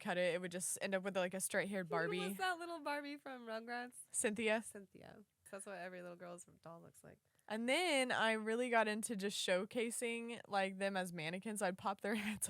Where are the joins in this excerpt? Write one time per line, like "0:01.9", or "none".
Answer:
0:04.0
0:05.4

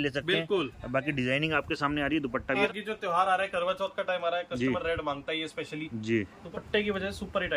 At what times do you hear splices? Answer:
0:02.7
0:06.4

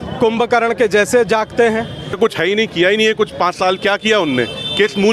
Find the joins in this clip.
0:02.0

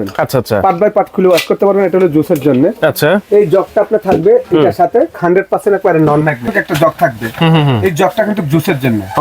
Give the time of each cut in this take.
0:05.2
0:06.5

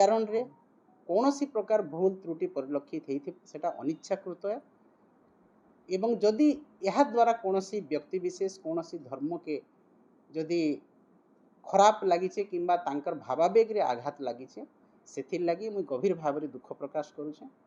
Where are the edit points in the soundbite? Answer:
none

